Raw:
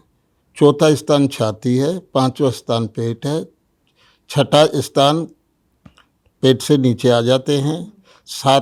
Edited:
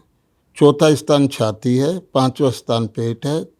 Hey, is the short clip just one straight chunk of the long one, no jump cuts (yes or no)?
yes